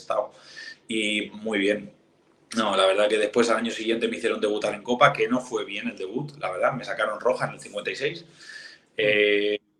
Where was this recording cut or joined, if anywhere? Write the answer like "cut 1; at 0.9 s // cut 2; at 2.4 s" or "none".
none